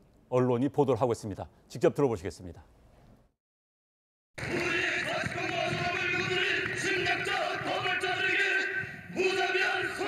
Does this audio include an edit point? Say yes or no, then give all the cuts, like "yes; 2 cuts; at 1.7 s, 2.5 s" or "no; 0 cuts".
no; 0 cuts